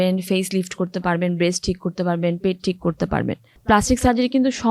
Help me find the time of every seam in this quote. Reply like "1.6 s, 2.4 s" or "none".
3.5 s